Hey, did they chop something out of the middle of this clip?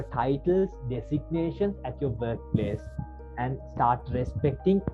no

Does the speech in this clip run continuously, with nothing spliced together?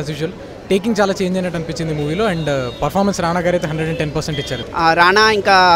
no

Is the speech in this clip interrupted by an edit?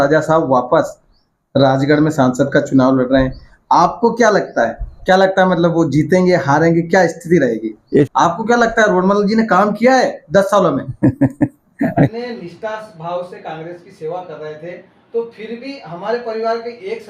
yes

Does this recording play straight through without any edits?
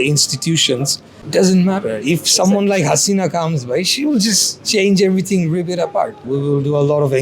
no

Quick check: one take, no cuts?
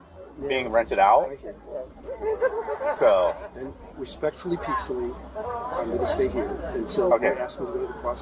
yes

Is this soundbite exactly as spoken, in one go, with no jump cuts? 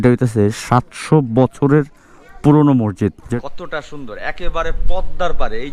no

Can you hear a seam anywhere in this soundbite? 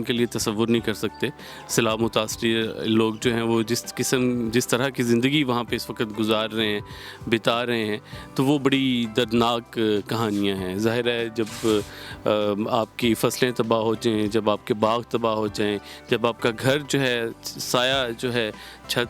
no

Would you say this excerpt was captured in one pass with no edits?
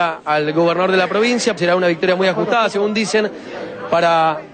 yes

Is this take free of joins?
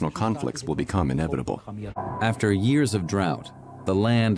no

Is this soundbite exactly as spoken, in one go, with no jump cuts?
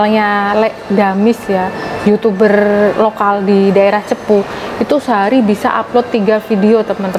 yes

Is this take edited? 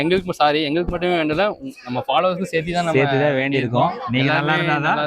yes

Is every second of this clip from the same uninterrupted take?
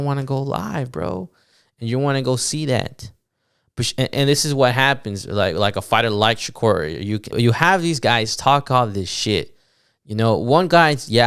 no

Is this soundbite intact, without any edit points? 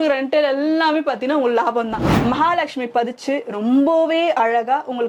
no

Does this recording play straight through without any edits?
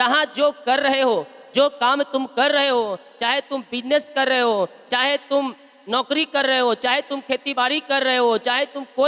yes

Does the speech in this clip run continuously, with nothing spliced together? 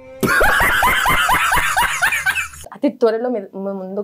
no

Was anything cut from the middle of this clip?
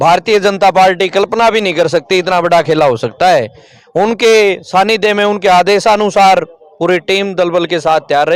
no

